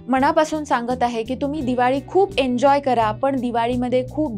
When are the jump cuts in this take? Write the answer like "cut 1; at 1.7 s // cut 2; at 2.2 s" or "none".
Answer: none